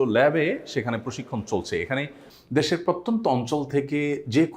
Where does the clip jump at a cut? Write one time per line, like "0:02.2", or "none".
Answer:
0:02.3

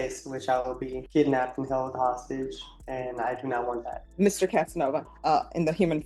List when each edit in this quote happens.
0:01.0
0:04.0
0:05.1

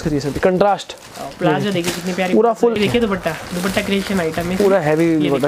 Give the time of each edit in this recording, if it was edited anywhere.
0:02.8

